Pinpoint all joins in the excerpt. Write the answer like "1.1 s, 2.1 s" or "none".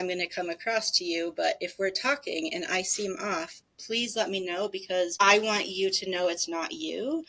5.1 s